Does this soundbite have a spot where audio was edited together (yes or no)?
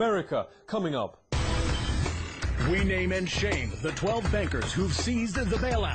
no